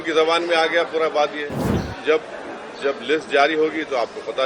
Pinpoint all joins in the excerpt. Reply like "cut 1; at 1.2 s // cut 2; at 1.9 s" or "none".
cut 1; at 1.9 s